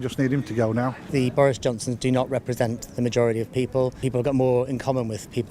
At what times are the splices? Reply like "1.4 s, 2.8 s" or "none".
1.0 s, 4.0 s